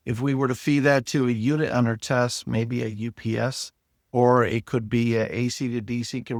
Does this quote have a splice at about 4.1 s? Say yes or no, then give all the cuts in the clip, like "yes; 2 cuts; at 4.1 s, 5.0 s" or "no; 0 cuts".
no; 0 cuts